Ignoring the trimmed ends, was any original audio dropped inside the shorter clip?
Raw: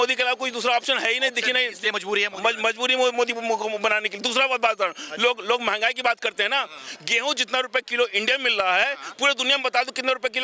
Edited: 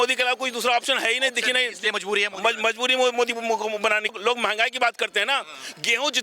yes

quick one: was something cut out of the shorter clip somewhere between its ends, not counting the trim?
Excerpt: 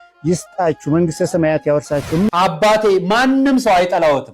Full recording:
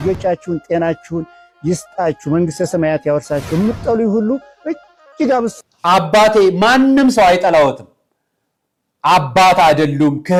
yes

